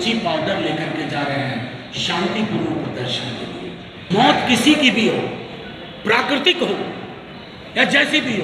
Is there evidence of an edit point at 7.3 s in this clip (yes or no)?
no